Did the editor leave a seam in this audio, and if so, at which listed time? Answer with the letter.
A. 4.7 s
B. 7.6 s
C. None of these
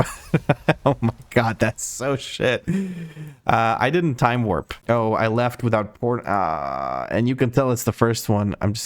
A